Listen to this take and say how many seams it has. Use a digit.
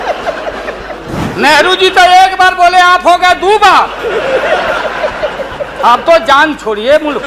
1